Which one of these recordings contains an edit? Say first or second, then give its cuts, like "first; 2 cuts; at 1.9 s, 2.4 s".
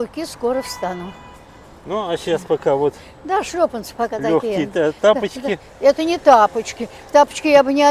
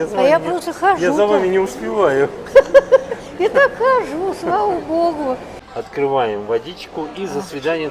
second; 1 cut; at 5.5 s